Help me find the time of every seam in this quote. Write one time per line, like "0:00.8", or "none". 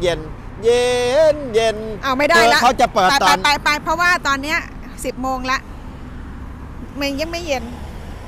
none

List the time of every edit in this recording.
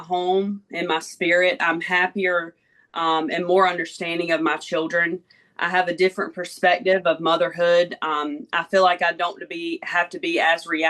none

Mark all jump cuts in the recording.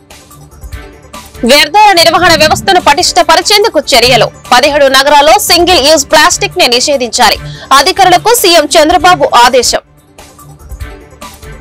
0:01.4
0:10.0

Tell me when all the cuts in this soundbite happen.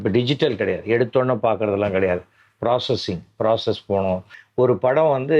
0:04.4

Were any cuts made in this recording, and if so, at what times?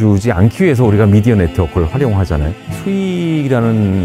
0:02.6

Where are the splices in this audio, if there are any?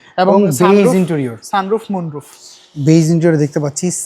none

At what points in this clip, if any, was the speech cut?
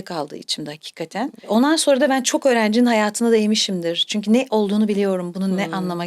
none

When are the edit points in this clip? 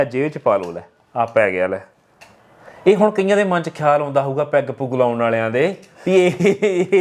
none

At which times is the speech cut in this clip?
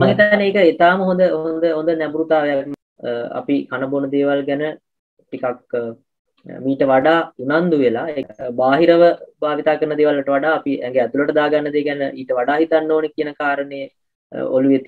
0:02.8
0:08.1

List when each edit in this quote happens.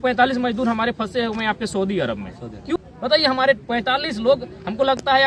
0:02.8

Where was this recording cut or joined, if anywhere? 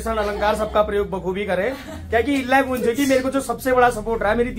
none

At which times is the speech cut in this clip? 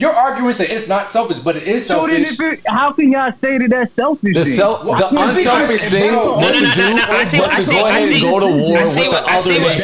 none

